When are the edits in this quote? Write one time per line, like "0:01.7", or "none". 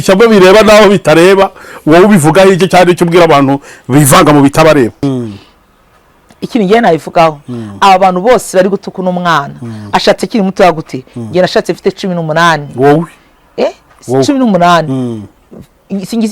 0:05.0